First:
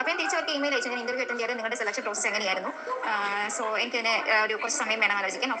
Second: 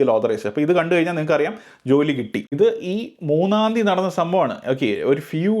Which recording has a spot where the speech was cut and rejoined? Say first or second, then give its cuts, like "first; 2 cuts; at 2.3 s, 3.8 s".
second; 1 cut; at 2.5 s